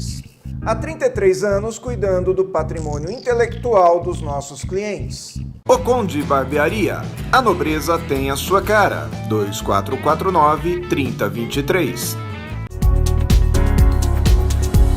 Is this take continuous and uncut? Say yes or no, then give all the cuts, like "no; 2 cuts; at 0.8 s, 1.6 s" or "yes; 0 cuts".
no; 1 cut; at 12.6 s